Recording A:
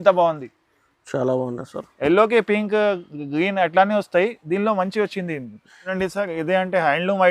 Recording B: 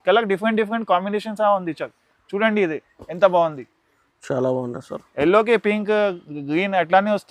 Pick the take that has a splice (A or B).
A